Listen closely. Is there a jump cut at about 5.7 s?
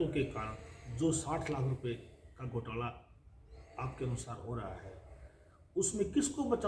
no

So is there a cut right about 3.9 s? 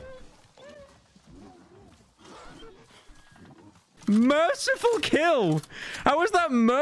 yes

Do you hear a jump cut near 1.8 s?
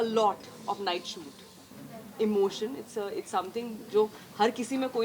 yes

